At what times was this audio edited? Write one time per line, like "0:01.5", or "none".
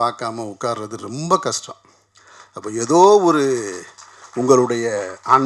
none